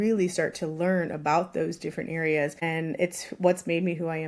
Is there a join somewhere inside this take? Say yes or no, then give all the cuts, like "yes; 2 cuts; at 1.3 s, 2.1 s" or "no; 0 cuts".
yes; 1 cut; at 2.6 s